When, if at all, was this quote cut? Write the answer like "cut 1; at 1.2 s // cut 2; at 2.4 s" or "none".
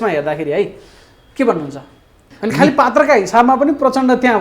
cut 1; at 2.3 s